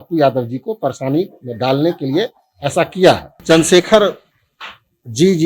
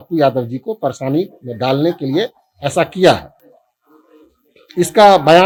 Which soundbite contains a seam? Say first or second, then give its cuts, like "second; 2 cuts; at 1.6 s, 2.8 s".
first; 1 cut; at 3.3 s